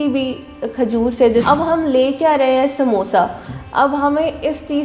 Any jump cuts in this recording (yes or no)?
yes